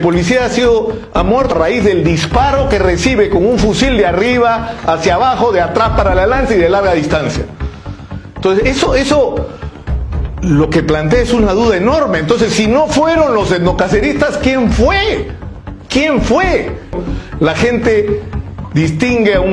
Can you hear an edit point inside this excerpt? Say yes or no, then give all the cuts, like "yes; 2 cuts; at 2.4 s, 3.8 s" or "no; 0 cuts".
yes; 2 cuts; at 1.5 s, 17.0 s